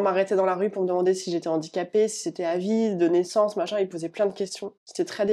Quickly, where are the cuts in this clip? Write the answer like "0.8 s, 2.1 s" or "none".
none